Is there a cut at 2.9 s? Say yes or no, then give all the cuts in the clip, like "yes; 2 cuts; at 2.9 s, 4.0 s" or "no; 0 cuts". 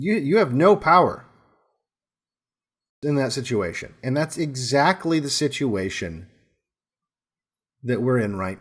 yes; 1 cut; at 2.9 s